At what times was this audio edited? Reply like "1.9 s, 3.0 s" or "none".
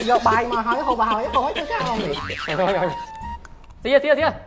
2.2 s